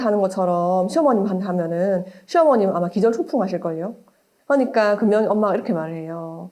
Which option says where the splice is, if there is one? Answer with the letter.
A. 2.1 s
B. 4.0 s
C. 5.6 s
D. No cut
B